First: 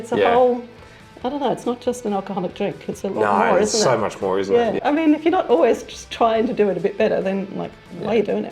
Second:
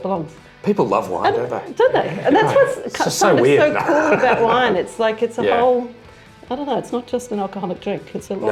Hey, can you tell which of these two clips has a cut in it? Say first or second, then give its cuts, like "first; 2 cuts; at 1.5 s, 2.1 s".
first; 1 cut; at 4.8 s